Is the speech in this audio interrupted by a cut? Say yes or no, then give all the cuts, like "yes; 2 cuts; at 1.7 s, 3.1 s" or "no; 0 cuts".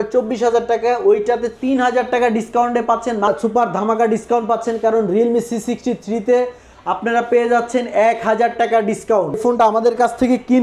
yes; 2 cuts; at 3.4 s, 9.4 s